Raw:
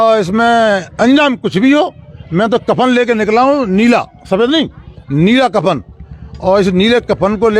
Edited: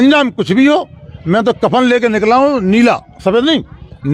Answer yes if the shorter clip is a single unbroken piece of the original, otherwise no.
yes